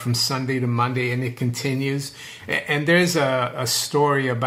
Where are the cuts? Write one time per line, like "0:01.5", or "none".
none